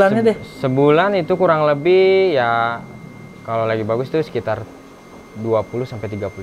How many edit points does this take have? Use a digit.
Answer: 0